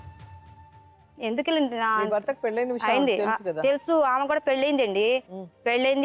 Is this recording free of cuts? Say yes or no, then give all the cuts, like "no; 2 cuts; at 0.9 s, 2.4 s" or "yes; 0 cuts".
no; 1 cut; at 1.0 s